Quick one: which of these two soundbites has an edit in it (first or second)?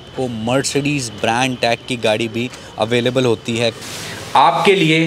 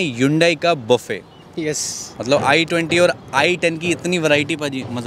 first